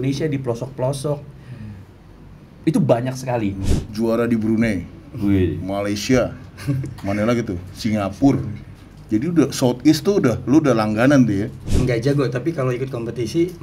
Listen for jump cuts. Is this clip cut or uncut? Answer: cut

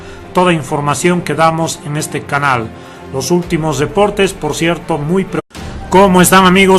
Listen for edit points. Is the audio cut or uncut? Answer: uncut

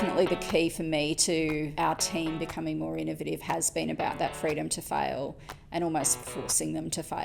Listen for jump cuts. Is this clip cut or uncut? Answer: cut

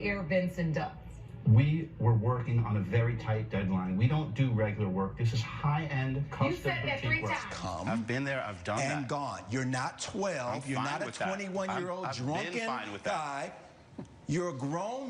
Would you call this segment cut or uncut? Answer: cut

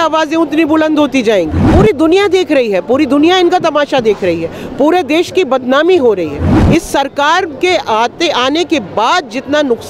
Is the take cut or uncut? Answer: cut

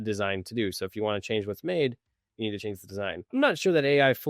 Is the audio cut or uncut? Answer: cut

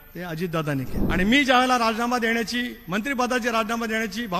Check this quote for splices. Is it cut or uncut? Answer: cut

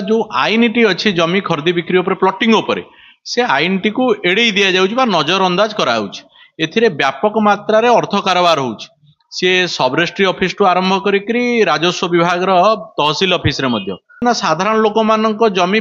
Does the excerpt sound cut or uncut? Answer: cut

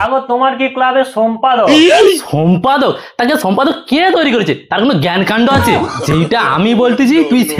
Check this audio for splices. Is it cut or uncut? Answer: uncut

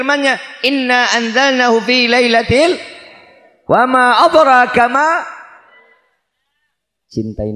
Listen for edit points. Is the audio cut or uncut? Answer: cut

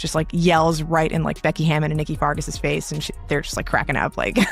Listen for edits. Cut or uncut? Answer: cut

